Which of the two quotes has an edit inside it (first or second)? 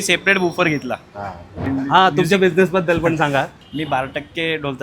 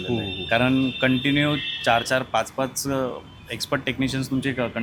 first